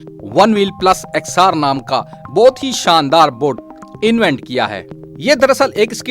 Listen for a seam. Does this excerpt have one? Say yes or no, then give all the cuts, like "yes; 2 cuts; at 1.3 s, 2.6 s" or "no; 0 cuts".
no; 0 cuts